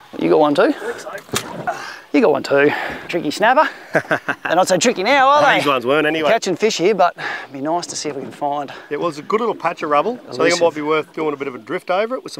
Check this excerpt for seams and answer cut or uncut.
uncut